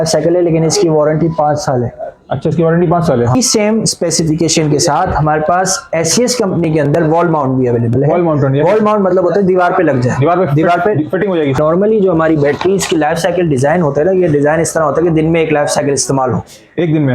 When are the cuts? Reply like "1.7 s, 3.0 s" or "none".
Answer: 3.4 s, 11.6 s